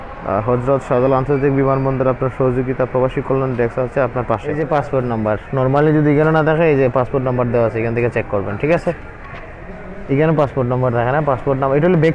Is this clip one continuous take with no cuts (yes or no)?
no